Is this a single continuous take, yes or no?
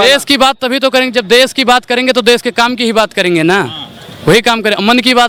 yes